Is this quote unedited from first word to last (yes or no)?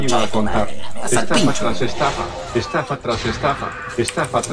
yes